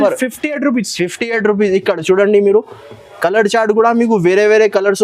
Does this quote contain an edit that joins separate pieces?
no; 0 cuts

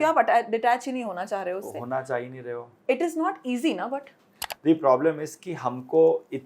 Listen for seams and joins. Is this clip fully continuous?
no; 1 cut; at 4.4 s

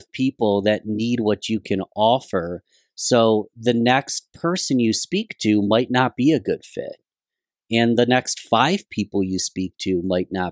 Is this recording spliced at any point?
no; 0 cuts

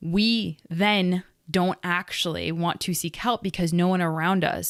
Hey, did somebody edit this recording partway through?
no; 0 cuts

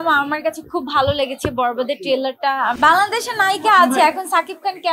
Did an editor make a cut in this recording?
yes; 1 cut; at 2.8 s

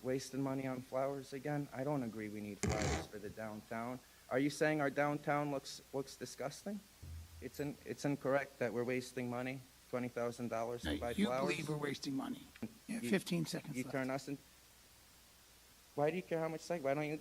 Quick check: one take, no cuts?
no; 2 cuts; at 7.2 s, 12.8 s

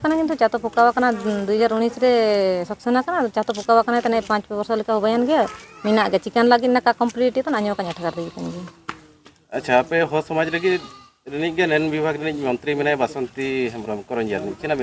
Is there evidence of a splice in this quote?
no; 0 cuts

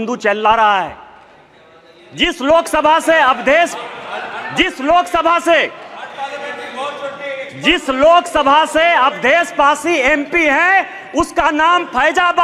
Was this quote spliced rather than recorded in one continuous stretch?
no; 0 cuts

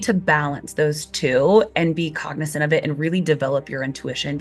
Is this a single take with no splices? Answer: yes; 0 cuts

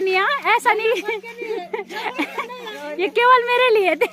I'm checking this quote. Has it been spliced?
yes; 1 cut; at 2.8 s

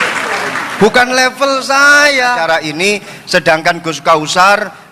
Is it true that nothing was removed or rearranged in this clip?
no; 1 cut; at 2.4 s

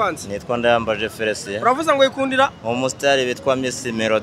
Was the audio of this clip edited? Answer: no; 0 cuts

